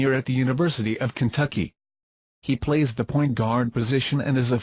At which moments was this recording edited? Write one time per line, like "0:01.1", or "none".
0:02.0